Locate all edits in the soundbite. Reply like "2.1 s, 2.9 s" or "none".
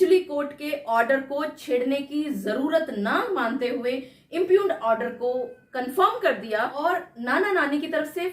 6.7 s